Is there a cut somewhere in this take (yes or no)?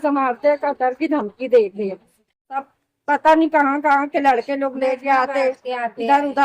yes